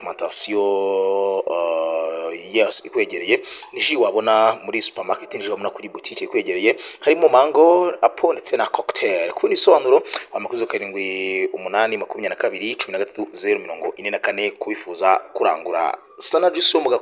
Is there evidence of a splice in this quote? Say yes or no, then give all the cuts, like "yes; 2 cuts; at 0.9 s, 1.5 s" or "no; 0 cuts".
no; 0 cuts